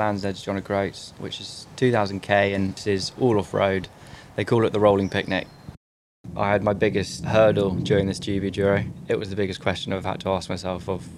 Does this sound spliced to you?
yes; 5 cuts; at 1.2 s, 2.8 s, 6.0 s, 7.2 s, 8.9 s

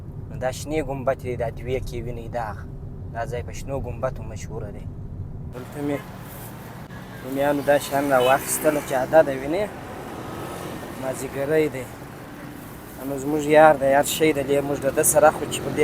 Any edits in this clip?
yes; 2 cuts; at 5.5 s, 6.9 s

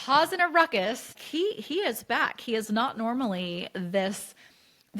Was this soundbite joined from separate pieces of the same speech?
yes; 1 cut; at 1.2 s

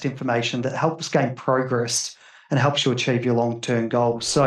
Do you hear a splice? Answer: no; 0 cuts

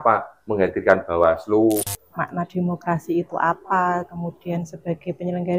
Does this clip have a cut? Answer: yes; 1 cut; at 2.0 s

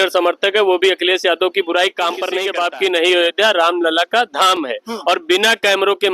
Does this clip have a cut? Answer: yes; 1 cut; at 2.4 s

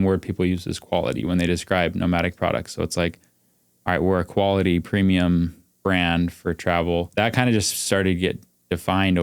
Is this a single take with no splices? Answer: no; 1 cut; at 7.1 s

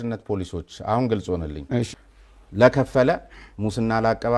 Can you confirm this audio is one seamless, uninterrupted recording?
no; 1 cut; at 2.0 s

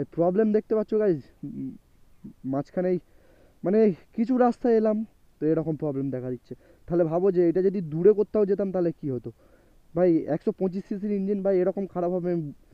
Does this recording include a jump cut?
no; 0 cuts

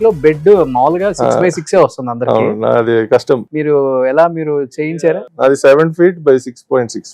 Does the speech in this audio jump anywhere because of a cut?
yes; 2 cuts; at 3.5 s, 4.9 s

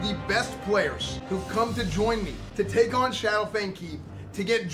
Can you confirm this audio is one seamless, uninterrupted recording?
no; 2 cuts; at 1.1 s, 2.4 s

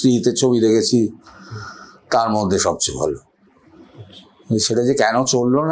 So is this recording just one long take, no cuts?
yes; 0 cuts

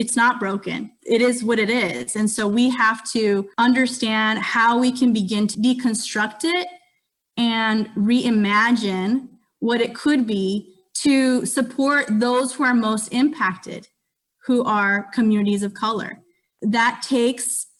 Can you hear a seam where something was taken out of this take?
no; 0 cuts

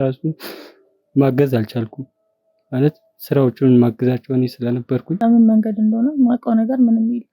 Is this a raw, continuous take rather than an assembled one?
no; 1 cut; at 5.1 s

